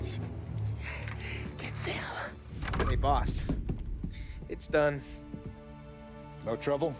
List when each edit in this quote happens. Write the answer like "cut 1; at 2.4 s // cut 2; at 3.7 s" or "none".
cut 1; at 2.4 s